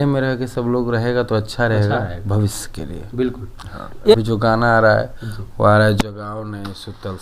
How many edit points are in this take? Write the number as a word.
one